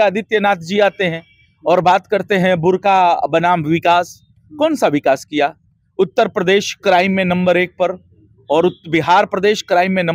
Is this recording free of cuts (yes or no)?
yes